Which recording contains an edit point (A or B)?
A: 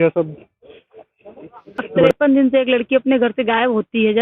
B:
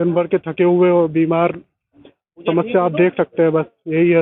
A